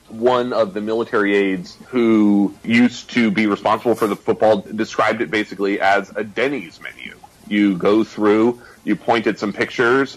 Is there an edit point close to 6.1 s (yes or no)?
no